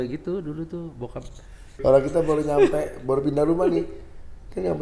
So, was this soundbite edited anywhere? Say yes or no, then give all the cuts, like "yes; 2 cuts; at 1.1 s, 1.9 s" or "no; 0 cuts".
yes; 1 cut; at 1.8 s